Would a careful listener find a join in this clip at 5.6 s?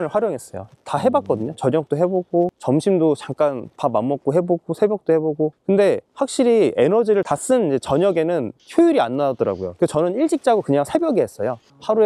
yes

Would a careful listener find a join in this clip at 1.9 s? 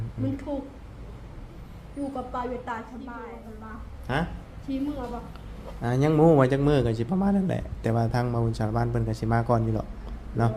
no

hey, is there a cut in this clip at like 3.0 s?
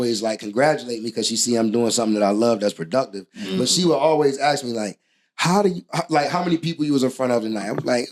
no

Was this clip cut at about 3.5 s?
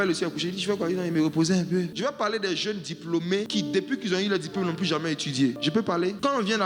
yes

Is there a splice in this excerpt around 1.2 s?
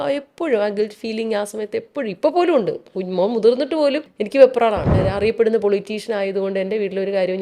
no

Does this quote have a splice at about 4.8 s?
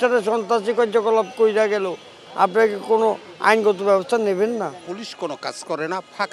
yes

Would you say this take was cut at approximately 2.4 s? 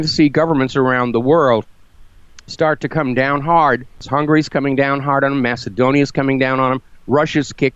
no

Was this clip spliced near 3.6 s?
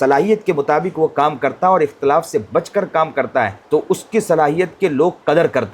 yes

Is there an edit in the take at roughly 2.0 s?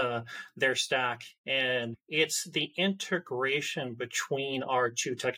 yes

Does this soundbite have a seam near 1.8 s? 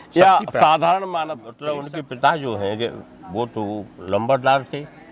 yes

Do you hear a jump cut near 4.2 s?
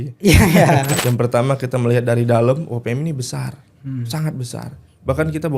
no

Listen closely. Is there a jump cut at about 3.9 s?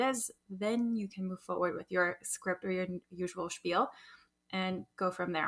no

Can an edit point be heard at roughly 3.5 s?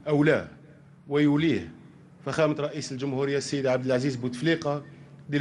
yes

